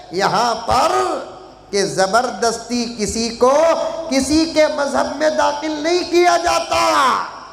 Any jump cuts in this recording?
no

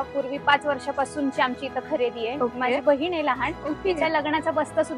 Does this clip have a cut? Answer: no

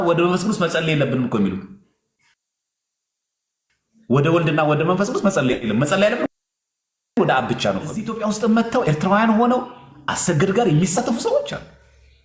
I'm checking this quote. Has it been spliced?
yes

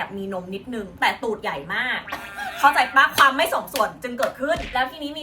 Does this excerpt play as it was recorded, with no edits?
yes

